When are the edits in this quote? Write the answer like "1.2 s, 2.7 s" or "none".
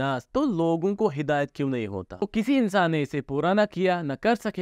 2.1 s